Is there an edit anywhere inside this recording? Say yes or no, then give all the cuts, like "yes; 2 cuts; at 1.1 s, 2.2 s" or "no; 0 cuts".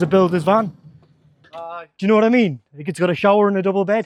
no; 0 cuts